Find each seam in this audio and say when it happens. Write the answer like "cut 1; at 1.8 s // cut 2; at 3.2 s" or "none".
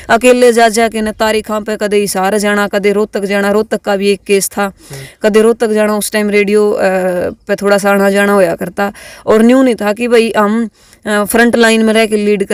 none